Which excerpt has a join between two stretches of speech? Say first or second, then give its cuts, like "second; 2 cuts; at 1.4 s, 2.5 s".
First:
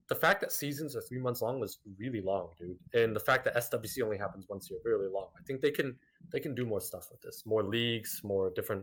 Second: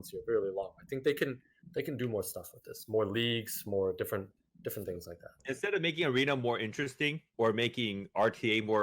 second; 2 cuts; at 5.4 s, 7.2 s